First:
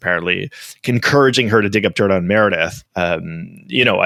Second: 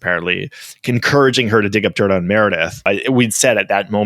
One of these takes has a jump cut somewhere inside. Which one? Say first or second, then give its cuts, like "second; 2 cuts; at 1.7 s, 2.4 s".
second; 1 cut; at 2.8 s